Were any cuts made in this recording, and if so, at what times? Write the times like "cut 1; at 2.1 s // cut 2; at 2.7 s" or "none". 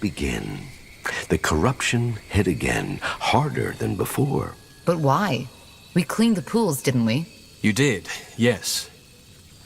cut 1; at 7.0 s